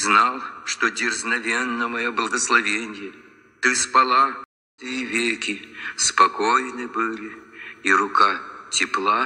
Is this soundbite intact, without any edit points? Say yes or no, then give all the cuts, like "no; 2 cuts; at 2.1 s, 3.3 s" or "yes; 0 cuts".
no; 1 cut; at 4.8 s